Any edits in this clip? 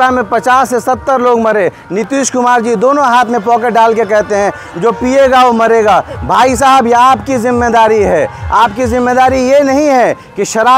no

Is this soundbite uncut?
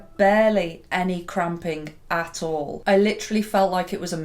no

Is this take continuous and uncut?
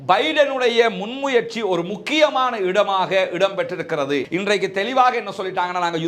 no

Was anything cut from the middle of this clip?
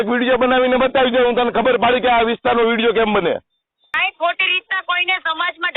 yes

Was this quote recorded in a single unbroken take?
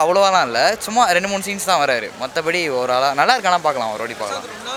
yes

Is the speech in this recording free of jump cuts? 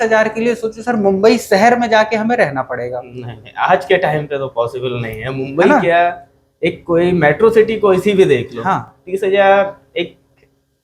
yes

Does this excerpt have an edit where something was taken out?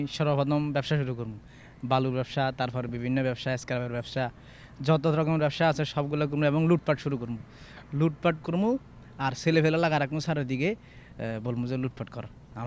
no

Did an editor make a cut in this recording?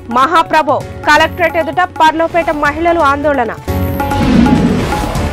no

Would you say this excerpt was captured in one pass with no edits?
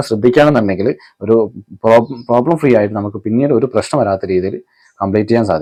yes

